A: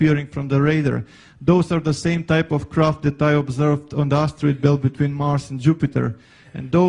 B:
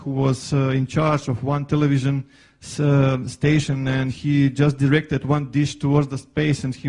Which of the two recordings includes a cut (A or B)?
A